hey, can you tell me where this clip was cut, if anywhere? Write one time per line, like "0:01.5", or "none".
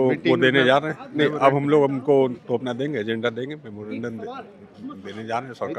none